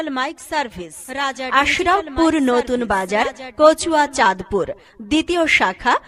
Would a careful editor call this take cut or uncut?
cut